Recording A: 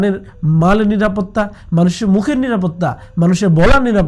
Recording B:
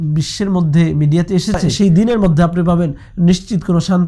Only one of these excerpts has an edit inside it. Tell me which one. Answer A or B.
B